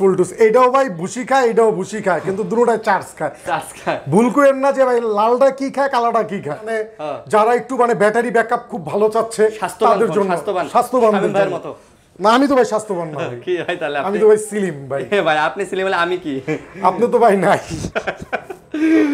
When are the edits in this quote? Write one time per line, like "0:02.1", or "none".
0:06.6